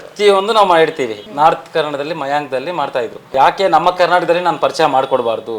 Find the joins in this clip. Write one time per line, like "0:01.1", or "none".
0:01.2
0:03.3